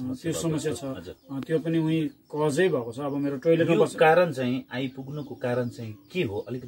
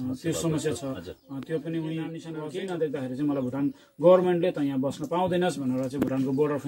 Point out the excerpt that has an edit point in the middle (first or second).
second